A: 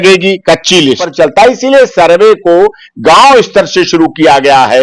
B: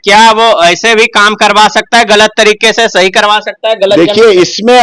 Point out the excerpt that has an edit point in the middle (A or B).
A